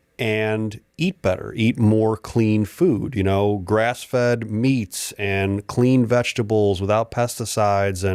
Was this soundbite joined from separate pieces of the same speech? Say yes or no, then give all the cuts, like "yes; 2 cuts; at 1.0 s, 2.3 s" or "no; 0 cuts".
no; 0 cuts